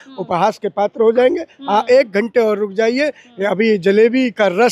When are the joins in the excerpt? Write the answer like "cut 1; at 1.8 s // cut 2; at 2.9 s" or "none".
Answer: none